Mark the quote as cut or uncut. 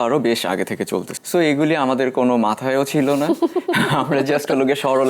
cut